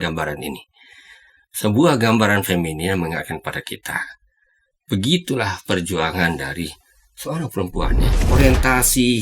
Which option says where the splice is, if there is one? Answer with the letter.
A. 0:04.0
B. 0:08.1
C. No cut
B